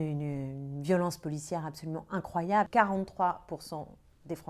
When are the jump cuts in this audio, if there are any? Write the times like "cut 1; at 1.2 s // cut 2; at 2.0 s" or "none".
cut 1; at 2.7 s